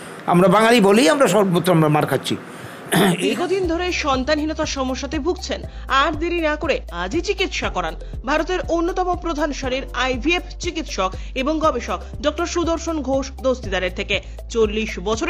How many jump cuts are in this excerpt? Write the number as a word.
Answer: one